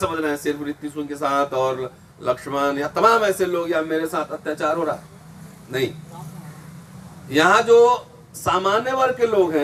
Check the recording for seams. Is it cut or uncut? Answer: uncut